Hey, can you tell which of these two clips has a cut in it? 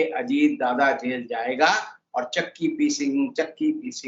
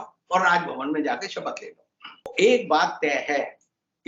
second; 1 cut; at 2.3 s

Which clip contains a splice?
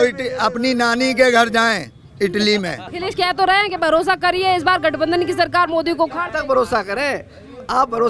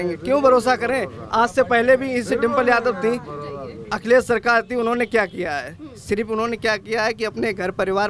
first; 1 cut; at 2.9 s

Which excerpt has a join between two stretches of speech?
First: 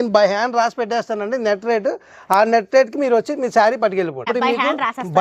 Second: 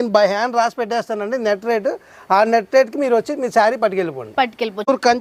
first; 1 cut; at 4.3 s

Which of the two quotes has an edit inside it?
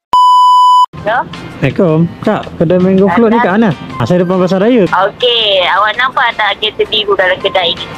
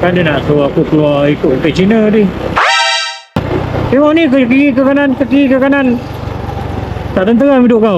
first; 3 cuts; at 1.0 s, 4.0 s, 4.9 s

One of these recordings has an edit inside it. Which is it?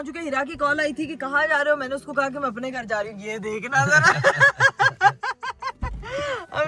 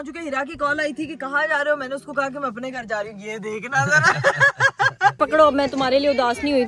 second; 1 cut; at 5.1 s

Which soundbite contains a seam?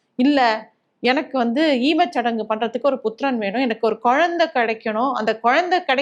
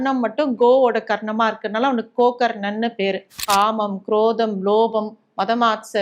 second; 1 cut; at 3.4 s

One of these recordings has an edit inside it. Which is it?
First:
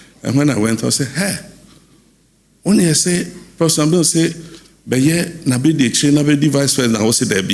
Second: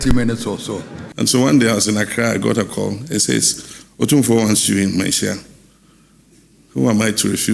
second; 1 cut; at 1.0 s

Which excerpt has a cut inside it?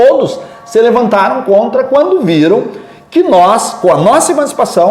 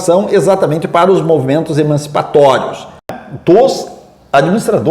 second; 1 cut; at 3.2 s

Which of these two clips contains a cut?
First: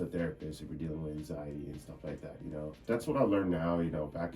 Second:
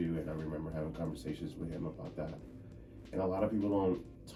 first; 1 cut; at 2.8 s

